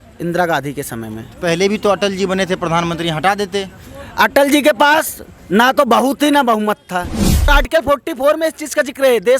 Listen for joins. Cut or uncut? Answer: cut